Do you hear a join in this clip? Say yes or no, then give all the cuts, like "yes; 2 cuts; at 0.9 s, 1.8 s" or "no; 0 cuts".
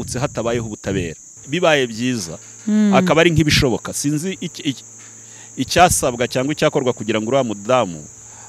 yes; 1 cut; at 1.4 s